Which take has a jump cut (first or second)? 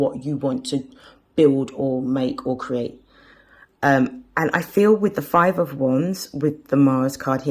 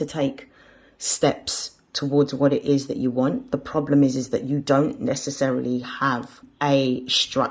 second